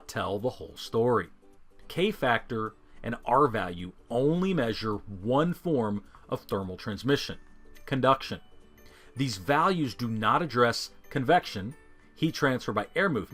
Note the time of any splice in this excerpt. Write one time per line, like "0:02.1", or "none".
0:01.9